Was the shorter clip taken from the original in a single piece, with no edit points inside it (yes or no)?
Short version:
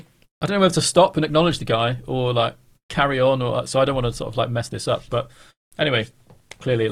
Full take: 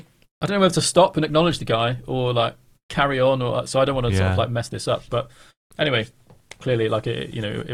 yes